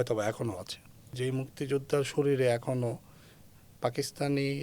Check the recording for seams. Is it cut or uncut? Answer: cut